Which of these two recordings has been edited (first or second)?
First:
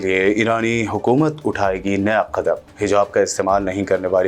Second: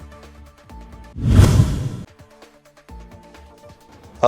second